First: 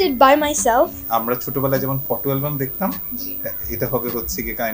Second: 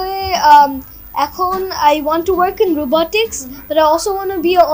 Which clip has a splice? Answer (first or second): first